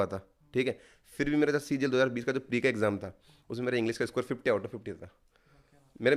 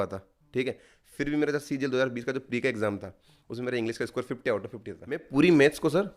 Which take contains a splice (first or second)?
second